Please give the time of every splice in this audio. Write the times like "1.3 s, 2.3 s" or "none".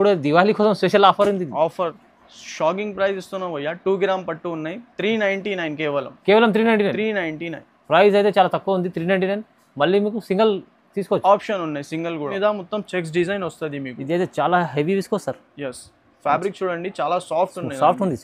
1.8 s, 12.3 s